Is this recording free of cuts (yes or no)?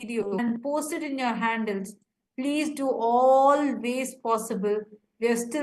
no